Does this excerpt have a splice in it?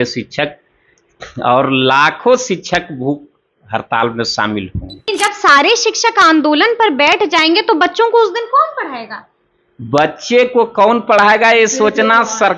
yes; 1 cut; at 5.0 s

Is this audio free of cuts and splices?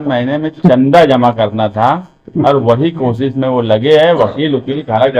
yes; 0 cuts

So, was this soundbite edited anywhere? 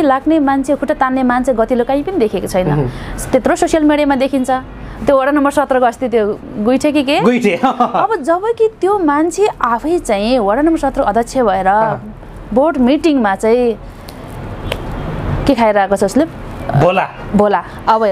no; 0 cuts

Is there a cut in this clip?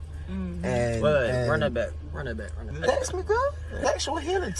yes; 1 cut; at 2.6 s

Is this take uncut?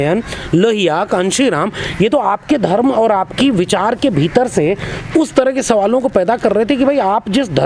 yes; 0 cuts

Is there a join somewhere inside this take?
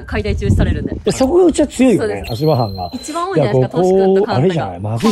yes; 1 cut; at 0.9 s

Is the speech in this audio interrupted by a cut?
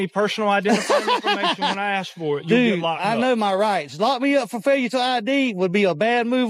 no; 0 cuts

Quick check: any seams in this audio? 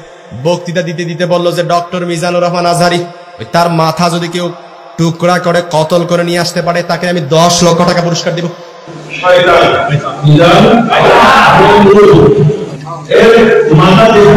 no; 0 cuts

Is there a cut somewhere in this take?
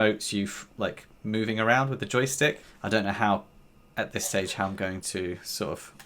yes; 1 cut; at 2.7 s

